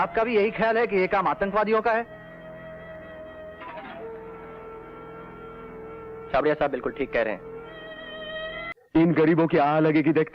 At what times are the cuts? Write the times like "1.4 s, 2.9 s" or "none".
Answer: 8.7 s